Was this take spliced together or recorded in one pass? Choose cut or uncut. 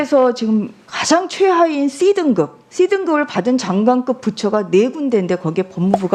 uncut